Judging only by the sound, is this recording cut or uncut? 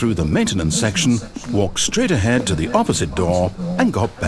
uncut